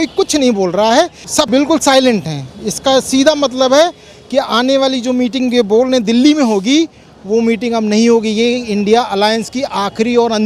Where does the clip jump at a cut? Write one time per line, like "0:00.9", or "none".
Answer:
0:01.3

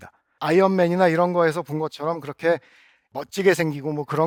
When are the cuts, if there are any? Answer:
none

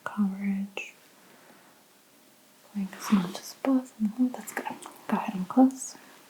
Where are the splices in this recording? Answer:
0:02.1

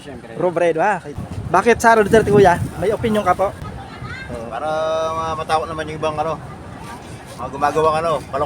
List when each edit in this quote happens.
0:01.1
0:03.6

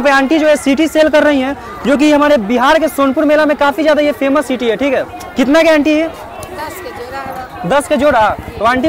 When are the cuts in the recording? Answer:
none

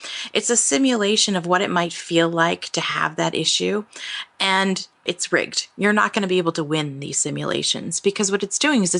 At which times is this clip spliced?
none

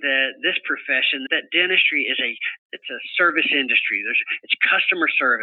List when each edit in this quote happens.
0:01.3

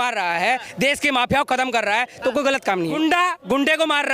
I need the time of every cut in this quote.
0:03.0

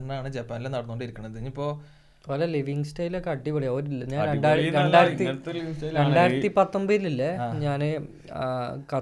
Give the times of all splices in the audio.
none

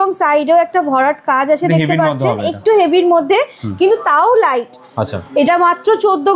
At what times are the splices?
none

